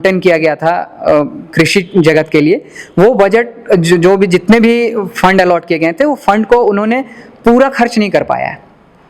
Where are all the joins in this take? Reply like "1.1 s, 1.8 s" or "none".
none